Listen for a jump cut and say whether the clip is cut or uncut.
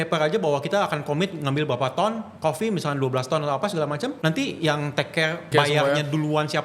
cut